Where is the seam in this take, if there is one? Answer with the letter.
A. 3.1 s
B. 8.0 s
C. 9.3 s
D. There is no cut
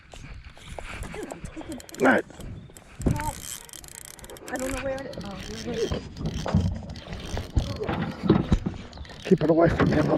D